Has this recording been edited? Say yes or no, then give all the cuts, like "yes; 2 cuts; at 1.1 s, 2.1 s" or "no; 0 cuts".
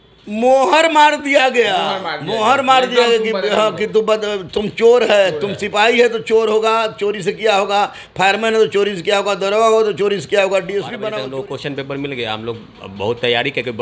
yes; 1 cut; at 11.1 s